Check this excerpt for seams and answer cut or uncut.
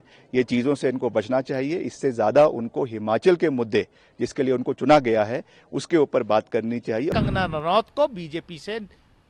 cut